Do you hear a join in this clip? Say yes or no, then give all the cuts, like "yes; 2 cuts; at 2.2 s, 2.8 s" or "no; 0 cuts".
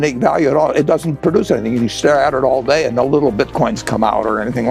no; 0 cuts